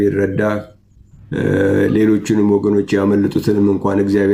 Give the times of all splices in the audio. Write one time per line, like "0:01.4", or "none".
none